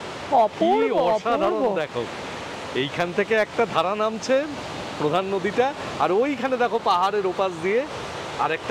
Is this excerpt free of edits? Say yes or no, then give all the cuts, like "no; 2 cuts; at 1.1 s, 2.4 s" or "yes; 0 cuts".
yes; 0 cuts